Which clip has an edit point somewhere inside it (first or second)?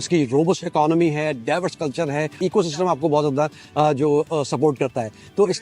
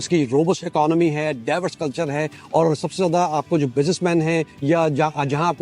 first